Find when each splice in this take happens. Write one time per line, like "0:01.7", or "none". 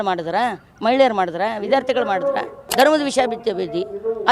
0:02.6